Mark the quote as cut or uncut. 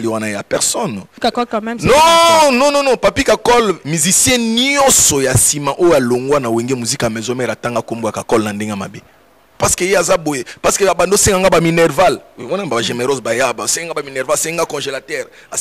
cut